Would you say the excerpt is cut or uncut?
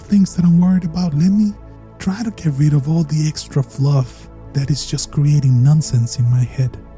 uncut